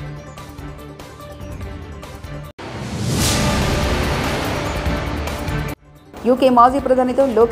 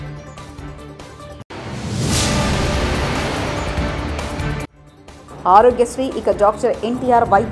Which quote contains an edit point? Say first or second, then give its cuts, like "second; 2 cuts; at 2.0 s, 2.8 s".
second; 2 cuts; at 1.4 s, 4.8 s